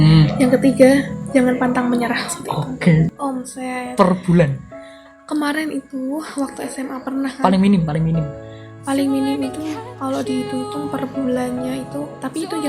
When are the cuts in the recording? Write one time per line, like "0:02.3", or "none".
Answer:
0:03.1